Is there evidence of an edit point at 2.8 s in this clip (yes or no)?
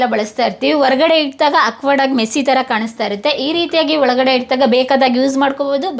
no